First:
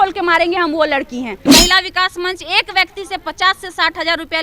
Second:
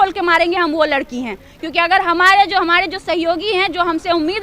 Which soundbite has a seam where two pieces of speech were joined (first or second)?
first